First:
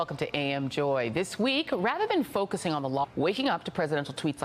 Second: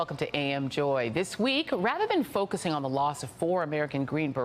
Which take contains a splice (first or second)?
second